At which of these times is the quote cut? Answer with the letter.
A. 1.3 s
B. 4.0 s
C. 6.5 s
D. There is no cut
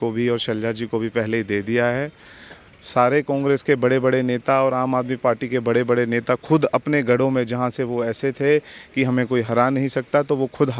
D